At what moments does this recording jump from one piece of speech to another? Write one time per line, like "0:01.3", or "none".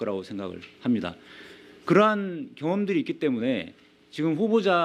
0:02.7